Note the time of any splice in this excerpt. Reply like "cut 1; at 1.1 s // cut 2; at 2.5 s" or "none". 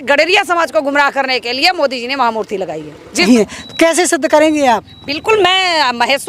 cut 1; at 3.2 s